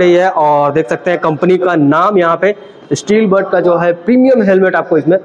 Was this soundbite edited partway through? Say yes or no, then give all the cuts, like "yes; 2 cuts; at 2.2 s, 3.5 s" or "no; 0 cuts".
no; 0 cuts